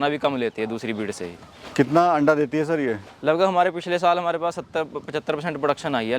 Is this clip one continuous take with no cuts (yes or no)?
yes